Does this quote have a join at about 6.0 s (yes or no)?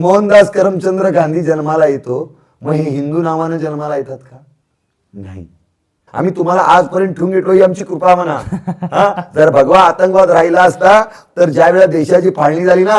yes